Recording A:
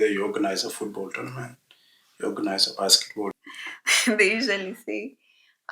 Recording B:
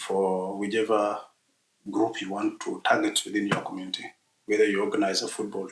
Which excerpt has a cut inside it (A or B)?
A